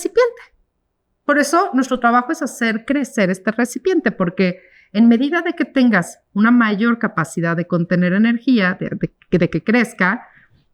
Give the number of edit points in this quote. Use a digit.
0